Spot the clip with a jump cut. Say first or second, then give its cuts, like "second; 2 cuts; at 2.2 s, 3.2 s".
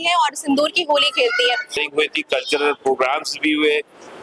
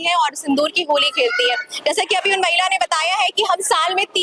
first; 1 cut; at 1.8 s